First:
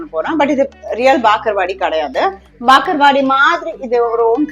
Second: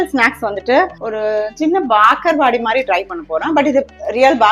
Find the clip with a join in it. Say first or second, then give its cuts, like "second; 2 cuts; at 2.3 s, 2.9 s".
second; 1 cut; at 1.0 s